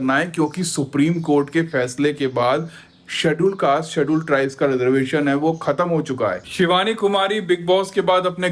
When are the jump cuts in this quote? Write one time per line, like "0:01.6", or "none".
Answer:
0:06.4